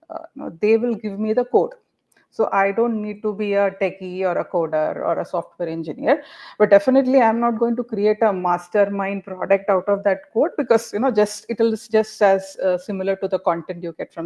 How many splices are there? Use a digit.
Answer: 0